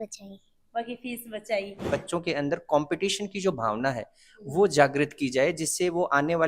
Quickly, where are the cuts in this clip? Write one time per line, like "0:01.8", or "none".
0:01.8

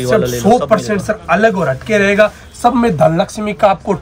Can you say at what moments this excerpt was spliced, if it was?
none

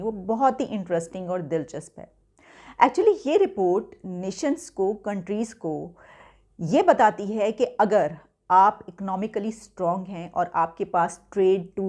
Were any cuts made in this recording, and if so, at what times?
none

